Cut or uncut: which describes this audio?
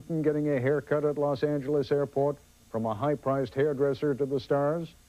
uncut